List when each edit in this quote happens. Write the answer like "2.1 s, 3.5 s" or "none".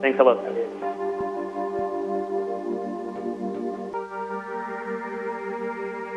4.0 s